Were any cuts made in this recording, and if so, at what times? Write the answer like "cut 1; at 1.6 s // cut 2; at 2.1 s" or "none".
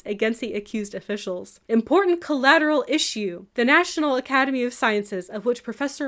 cut 1; at 1.5 s // cut 2; at 3.4 s